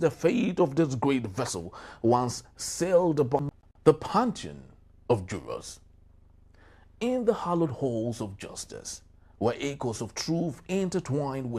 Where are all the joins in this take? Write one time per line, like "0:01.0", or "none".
0:03.4